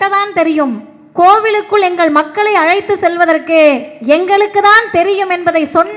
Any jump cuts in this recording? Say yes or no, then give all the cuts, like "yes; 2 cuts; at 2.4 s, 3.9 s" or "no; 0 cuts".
no; 0 cuts